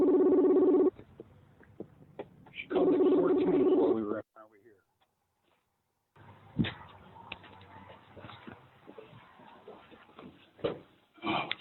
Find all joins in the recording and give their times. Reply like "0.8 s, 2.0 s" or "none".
0.9 s